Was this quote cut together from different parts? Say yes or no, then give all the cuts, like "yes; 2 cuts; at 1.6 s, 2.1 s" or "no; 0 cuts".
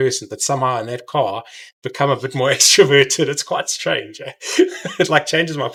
no; 0 cuts